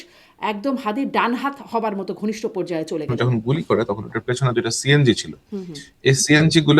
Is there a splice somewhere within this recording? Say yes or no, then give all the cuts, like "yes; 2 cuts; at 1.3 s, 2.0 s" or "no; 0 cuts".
yes; 1 cut; at 3.1 s